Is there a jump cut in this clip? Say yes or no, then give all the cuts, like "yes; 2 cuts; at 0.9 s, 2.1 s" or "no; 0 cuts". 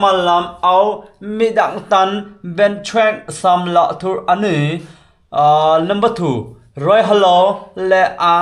no; 0 cuts